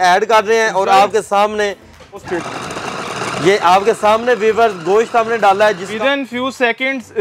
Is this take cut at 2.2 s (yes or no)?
yes